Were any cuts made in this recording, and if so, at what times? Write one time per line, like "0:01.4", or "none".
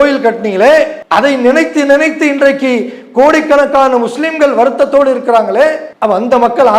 0:01.0
0:05.9